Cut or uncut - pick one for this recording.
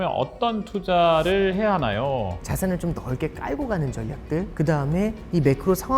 cut